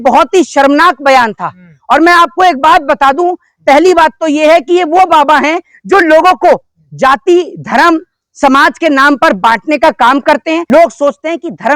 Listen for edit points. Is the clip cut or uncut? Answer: cut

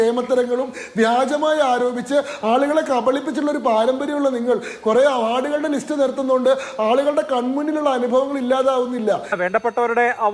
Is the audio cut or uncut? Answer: cut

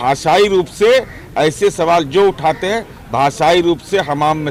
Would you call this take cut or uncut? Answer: uncut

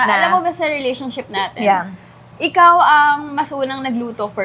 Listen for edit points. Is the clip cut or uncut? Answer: uncut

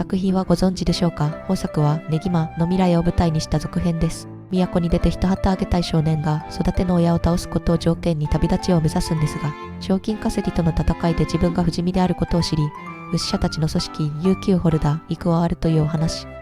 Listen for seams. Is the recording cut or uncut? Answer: uncut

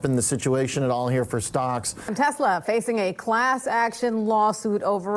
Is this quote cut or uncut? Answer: cut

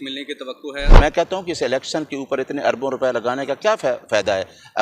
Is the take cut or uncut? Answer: cut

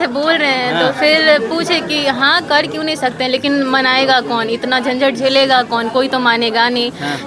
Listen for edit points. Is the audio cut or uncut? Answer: uncut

